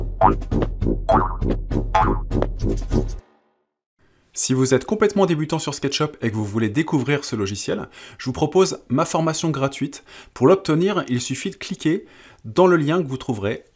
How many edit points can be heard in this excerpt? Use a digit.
0